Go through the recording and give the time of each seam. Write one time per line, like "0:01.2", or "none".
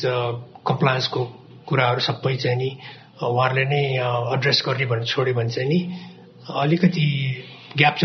none